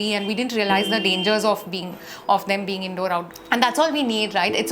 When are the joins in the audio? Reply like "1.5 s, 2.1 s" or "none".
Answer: 3.4 s